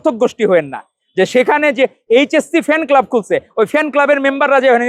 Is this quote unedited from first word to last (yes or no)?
yes